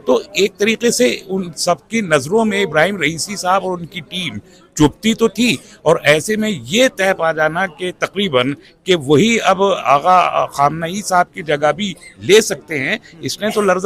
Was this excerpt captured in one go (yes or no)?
yes